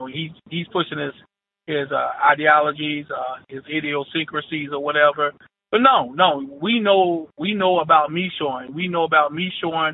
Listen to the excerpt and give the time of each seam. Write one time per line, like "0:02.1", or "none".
none

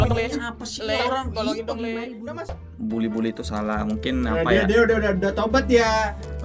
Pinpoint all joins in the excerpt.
0:02.7

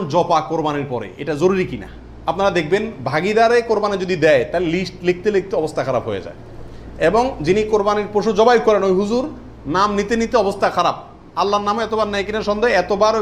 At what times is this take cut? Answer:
none

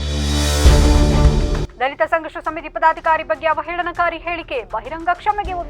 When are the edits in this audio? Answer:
0:01.6

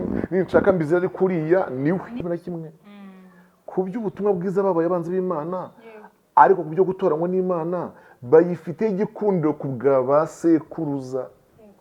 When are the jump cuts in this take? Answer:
0:02.2

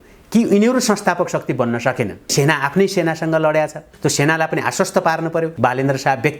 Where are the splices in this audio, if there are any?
0:02.3
0:05.5

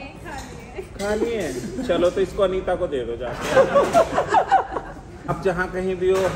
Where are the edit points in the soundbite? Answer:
0:05.3

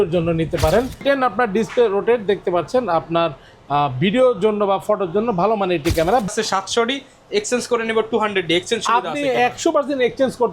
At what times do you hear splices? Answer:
0:01.0
0:06.3

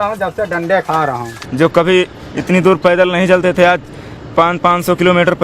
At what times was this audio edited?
0:01.3

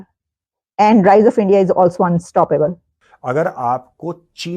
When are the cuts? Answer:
0:02.9

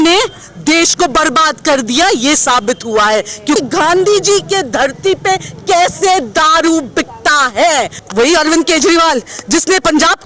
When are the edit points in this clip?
0:03.6
0:08.0

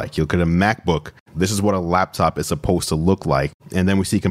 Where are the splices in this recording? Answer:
0:01.2

